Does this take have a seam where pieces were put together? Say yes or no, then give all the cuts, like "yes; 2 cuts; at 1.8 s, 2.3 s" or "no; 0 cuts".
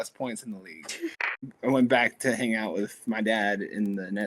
yes; 1 cut; at 1.1 s